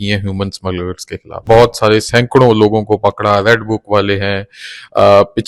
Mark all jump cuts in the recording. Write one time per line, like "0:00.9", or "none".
0:01.5